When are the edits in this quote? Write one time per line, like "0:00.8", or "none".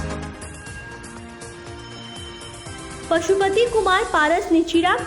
0:02.9